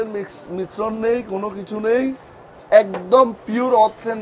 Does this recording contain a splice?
no; 0 cuts

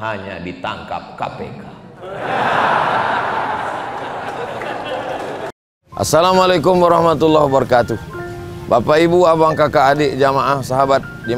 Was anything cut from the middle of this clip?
yes; 1 cut; at 5.6 s

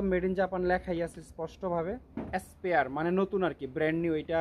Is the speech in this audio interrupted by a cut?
yes; 1 cut; at 2.1 s

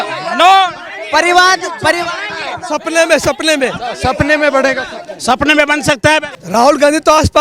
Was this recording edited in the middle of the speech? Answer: yes; 1 cut; at 6.4 s

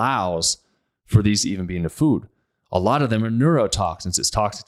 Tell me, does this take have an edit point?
no; 0 cuts

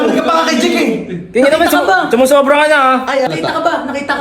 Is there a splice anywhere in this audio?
no; 0 cuts

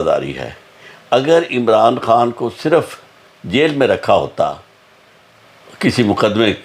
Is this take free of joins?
yes; 0 cuts

